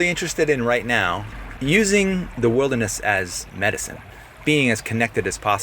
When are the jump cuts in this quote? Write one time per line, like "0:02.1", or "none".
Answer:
0:01.3
0:02.3
0:04.1